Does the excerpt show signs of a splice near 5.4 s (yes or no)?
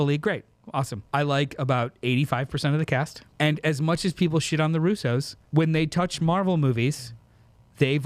yes